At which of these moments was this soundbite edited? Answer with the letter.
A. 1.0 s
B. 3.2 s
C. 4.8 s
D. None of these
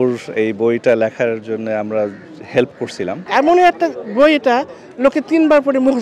B